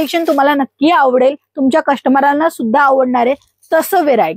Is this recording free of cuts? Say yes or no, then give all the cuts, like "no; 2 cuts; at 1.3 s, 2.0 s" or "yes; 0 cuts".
yes; 0 cuts